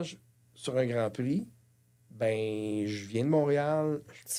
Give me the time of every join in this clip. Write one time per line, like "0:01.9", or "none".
none

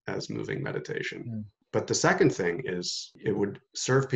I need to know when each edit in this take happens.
0:01.6
0:03.1

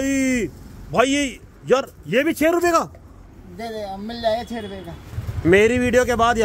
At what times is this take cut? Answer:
0:05.0

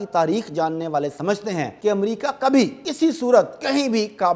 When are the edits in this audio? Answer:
0:01.7
0:02.8

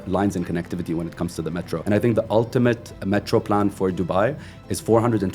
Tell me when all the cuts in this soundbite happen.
0:01.8

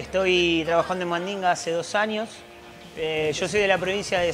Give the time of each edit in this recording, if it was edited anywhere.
0:02.9

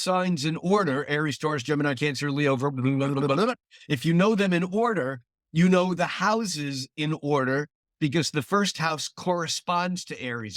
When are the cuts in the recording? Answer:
none

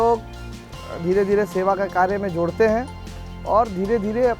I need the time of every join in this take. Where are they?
none

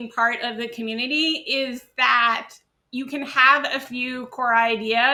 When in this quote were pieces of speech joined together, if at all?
none

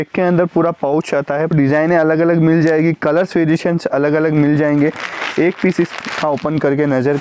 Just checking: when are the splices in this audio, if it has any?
0:01.5

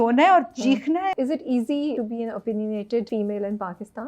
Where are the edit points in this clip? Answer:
0:01.1
0:01.9
0:03.1

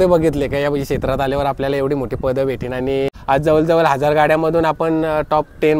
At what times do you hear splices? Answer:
0:03.2

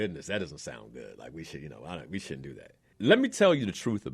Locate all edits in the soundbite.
0:02.8

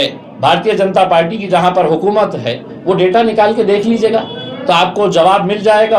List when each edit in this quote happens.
none

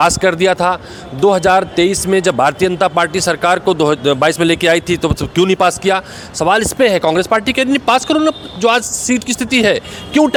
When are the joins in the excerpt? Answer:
none

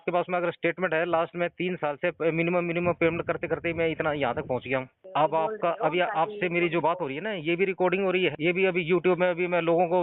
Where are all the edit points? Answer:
0:05.0
0:08.4

